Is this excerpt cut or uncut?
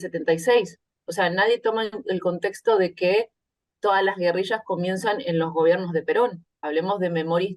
cut